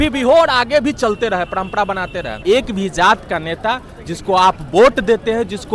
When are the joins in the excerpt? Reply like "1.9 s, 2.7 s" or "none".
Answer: 2.3 s